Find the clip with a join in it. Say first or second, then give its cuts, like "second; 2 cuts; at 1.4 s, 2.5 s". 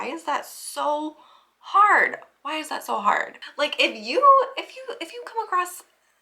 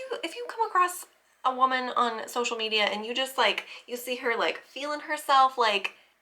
first; 1 cut; at 3.4 s